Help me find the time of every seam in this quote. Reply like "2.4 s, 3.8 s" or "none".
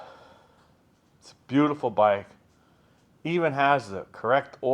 none

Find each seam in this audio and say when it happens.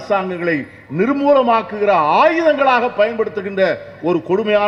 none

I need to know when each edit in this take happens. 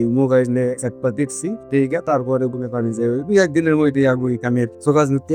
none

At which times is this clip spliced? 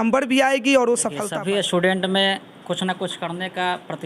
1.3 s

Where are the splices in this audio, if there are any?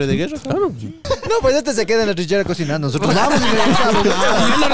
1.0 s

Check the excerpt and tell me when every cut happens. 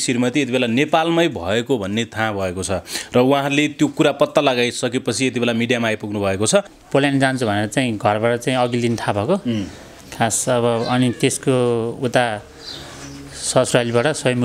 6.8 s

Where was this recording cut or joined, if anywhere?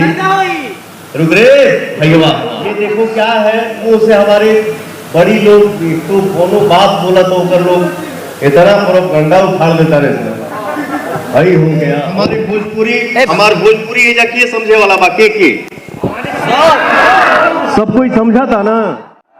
2.8 s, 12.1 s

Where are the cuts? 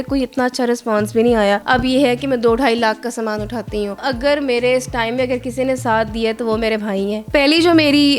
1.6 s, 4.0 s, 7.2 s

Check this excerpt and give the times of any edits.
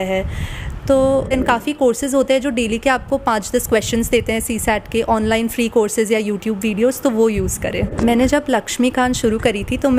1.3 s, 7.9 s

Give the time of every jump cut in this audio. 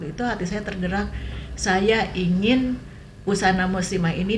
none

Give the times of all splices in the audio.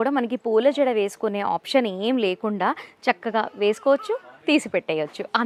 none

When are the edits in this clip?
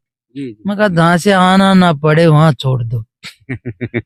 none

